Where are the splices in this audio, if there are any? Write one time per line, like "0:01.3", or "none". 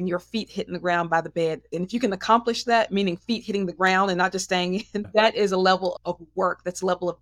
0:01.7
0:05.1